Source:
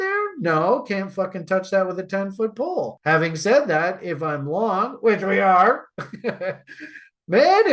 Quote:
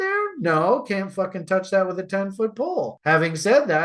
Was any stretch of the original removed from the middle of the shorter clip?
no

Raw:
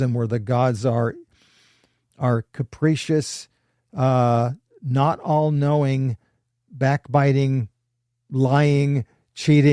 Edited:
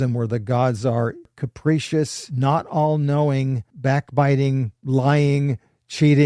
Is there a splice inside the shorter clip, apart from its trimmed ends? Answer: yes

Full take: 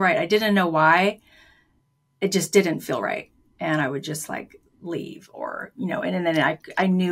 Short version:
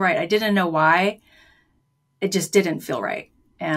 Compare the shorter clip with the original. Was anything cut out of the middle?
no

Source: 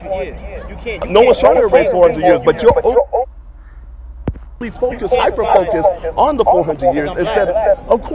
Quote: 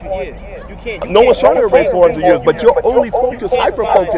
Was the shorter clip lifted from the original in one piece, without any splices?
no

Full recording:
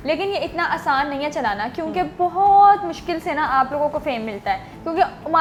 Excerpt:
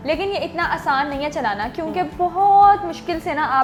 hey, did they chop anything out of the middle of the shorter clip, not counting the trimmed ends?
no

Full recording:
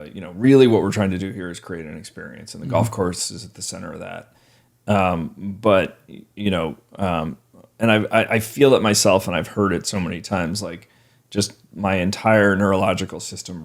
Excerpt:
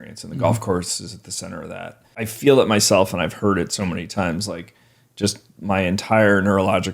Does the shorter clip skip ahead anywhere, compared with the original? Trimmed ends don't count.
yes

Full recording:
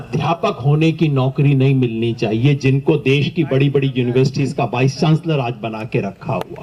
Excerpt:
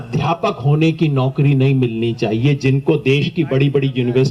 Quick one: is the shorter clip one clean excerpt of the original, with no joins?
yes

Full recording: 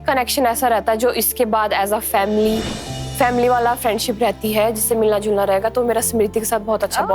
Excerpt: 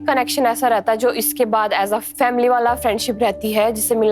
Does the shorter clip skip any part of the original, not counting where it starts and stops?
yes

